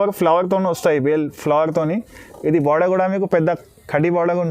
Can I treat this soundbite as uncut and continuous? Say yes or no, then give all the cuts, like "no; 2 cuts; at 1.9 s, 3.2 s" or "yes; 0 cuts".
yes; 0 cuts